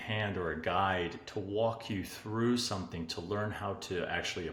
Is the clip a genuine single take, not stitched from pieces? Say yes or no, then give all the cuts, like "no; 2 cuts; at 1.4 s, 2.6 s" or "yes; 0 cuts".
yes; 0 cuts